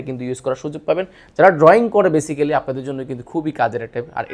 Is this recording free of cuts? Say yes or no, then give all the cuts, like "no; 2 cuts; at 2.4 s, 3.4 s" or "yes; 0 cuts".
yes; 0 cuts